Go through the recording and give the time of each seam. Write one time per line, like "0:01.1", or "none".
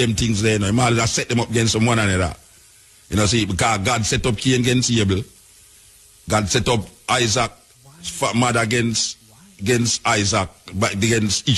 none